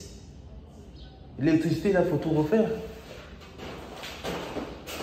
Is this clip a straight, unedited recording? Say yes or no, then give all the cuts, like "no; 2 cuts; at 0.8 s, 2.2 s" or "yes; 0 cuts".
yes; 0 cuts